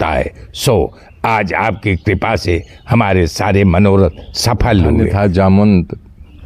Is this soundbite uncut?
no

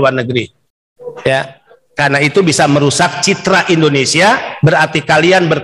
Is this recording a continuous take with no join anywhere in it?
no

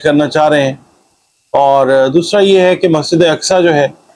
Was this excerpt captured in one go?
yes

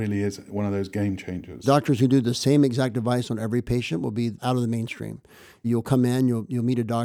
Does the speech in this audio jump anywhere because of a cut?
yes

